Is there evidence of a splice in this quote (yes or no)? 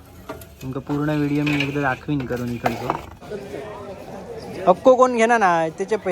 yes